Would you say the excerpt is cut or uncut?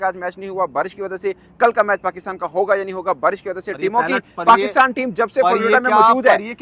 uncut